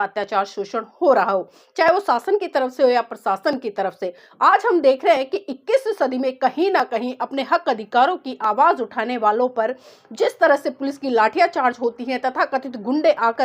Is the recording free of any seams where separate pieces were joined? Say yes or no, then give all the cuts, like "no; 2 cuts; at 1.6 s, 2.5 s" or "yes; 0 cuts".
yes; 0 cuts